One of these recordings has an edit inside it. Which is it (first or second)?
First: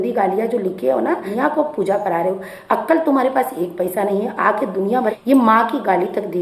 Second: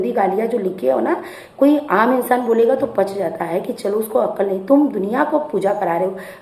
first